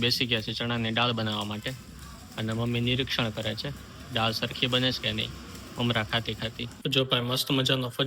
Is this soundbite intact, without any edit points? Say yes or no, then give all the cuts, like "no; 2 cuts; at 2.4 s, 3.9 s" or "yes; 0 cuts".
no; 1 cut; at 6.8 s